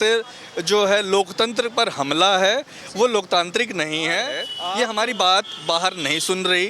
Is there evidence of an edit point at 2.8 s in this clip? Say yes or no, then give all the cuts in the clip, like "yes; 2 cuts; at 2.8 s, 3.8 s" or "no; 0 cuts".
no; 1 cut; at 4.5 s